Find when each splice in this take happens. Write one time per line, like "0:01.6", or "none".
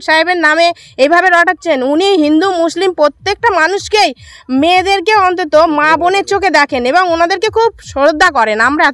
none